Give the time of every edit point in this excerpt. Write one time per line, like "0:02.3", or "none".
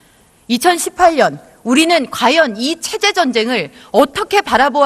0:01.5